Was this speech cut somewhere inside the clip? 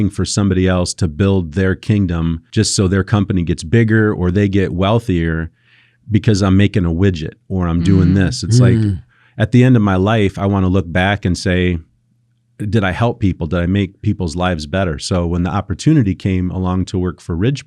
yes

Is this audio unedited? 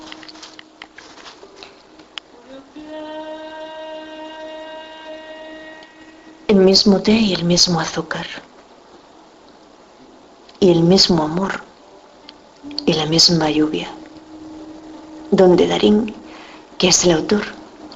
no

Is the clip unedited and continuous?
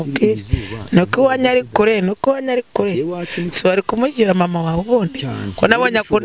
yes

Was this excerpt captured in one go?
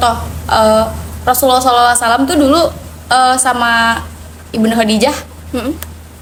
yes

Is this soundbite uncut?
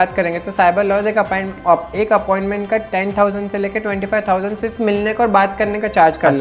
yes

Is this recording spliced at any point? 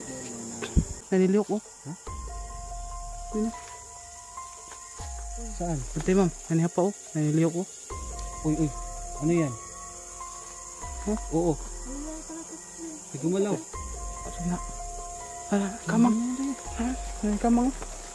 yes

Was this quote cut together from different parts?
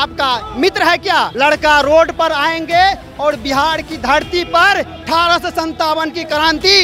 yes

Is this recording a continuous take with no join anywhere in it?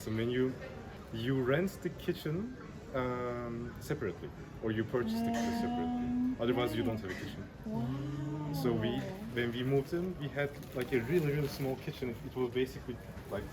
no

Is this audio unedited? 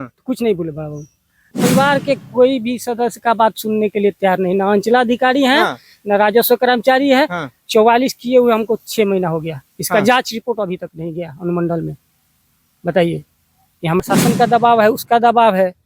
no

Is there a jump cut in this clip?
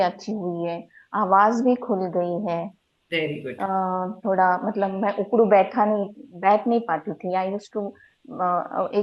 no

